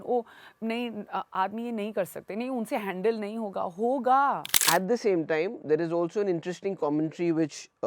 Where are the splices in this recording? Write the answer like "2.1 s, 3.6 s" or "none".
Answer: 4.5 s